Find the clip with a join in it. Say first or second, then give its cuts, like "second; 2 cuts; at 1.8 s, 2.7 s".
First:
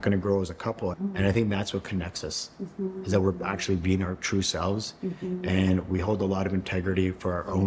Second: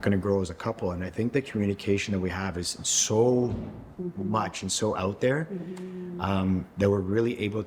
first; 1 cut; at 1.0 s